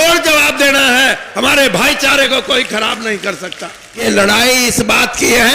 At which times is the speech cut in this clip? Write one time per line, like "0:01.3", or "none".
0:04.0